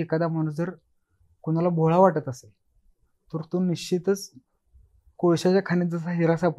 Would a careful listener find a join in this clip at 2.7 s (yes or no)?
no